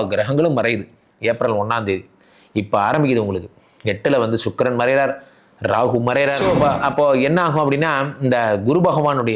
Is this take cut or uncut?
cut